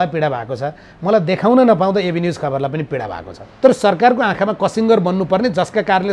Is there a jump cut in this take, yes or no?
yes